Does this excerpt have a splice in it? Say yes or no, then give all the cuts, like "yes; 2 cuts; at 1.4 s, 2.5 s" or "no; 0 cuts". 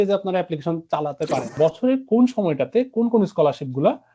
yes; 1 cut; at 1.5 s